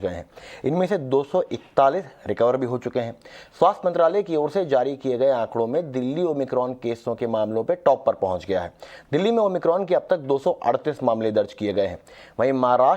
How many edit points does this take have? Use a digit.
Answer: 1